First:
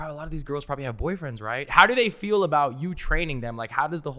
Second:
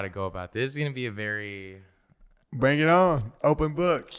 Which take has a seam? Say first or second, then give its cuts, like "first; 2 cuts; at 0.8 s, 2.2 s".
second; 1 cut; at 3.3 s